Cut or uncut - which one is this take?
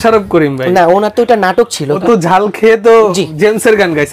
cut